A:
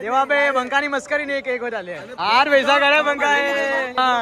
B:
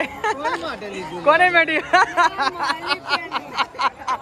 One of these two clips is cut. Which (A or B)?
A